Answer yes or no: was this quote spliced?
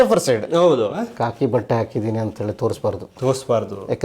yes